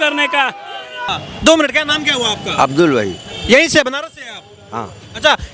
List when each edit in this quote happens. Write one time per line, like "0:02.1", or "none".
0:01.0